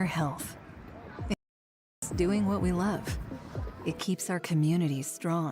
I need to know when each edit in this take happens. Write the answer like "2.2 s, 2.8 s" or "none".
1.8 s